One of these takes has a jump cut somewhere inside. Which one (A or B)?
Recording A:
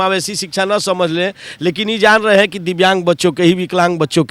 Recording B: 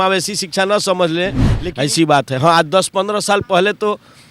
B